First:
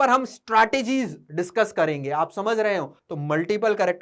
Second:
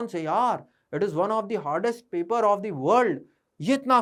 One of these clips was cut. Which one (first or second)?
first